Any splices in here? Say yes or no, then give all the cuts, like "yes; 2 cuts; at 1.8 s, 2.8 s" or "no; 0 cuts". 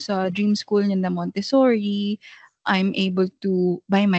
no; 0 cuts